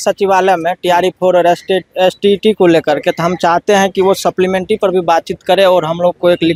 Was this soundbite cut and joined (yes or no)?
no